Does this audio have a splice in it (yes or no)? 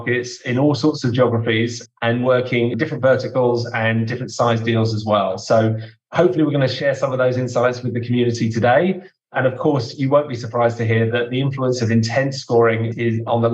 yes